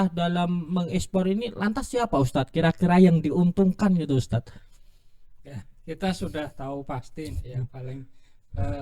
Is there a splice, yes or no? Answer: no